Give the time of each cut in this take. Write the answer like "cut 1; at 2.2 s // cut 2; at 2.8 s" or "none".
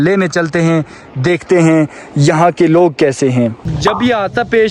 cut 1; at 3.6 s